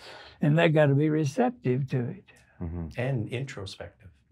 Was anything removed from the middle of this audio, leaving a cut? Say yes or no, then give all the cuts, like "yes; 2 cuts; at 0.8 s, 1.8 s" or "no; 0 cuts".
no; 0 cuts